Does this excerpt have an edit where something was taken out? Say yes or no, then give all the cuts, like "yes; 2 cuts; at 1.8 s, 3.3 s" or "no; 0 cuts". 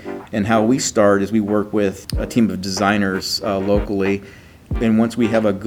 yes; 2 cuts; at 2.0 s, 4.8 s